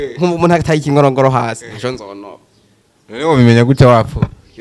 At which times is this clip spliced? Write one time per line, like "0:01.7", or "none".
none